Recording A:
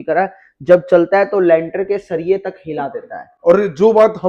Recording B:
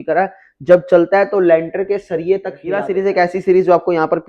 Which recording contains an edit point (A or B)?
B